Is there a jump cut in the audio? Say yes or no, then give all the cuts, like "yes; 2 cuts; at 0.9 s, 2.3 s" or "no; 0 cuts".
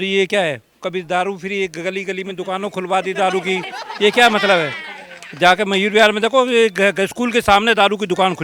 no; 0 cuts